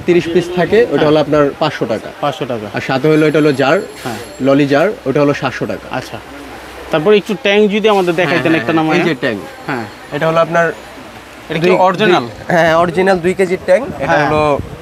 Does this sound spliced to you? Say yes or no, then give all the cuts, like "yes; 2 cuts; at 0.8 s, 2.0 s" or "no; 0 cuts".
no; 0 cuts